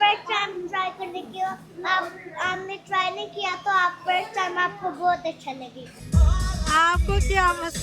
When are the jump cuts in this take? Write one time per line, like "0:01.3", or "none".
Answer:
0:05.9